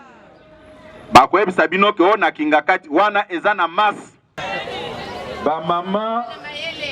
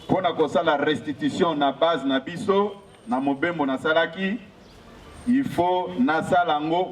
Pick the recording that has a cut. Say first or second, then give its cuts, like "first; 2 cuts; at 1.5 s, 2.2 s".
first; 1 cut; at 4.4 s